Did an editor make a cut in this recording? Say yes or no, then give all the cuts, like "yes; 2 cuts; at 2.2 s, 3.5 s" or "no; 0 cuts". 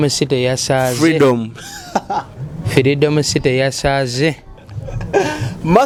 no; 0 cuts